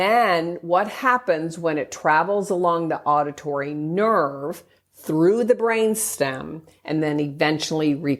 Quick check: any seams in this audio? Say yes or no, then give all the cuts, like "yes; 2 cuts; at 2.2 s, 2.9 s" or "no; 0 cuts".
no; 0 cuts